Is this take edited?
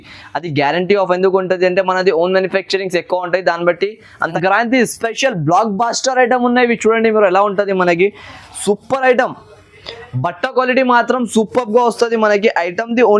yes; 1 cut; at 4.3 s

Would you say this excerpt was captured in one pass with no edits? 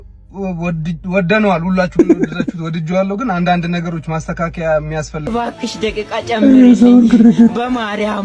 no; 1 cut; at 5.3 s

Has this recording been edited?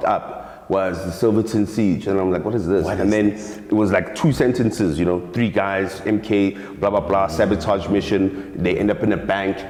no; 0 cuts

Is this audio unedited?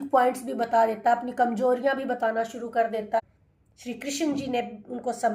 no; 1 cut; at 3.2 s

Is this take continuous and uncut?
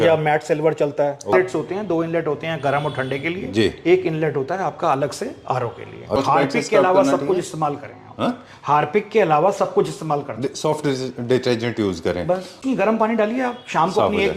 no; 3 cuts; at 1.3 s, 6.2 s, 12.6 s

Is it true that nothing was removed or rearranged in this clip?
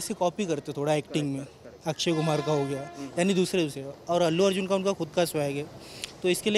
yes; 0 cuts

